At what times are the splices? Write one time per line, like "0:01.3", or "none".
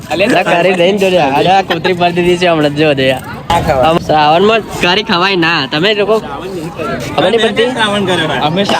0:03.5